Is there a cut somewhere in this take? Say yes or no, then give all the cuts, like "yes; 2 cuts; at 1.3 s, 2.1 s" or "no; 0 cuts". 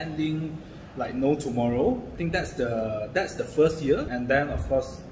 yes; 2 cuts; at 2.1 s, 4.1 s